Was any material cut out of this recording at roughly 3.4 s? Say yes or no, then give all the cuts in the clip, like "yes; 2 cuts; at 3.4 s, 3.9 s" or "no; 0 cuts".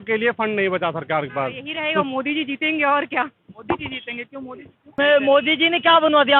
no; 2 cuts; at 2.0 s, 4.9 s